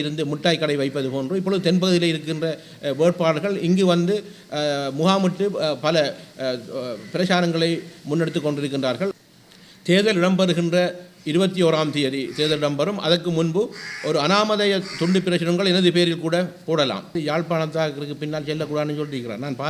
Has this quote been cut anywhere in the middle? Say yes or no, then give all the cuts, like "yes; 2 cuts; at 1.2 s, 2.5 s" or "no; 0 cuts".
yes; 2 cuts; at 9.2 s, 17.2 s